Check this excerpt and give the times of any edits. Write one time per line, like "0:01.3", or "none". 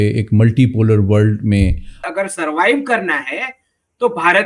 0:02.0